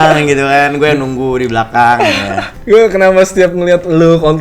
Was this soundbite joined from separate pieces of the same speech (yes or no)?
yes